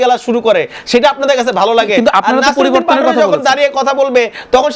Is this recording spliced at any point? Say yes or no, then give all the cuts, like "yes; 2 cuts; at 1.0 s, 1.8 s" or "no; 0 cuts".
no; 0 cuts